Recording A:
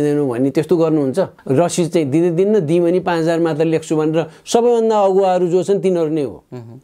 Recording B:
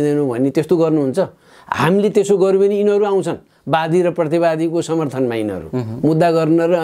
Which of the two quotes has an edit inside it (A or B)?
A